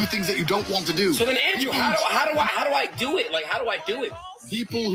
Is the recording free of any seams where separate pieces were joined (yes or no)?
yes